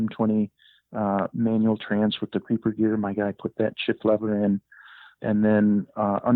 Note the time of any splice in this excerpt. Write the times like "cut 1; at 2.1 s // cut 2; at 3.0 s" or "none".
cut 1; at 5.1 s